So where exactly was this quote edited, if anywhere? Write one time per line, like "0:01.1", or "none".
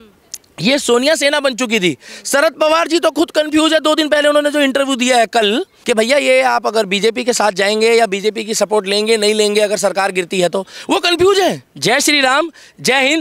0:05.7
0:11.7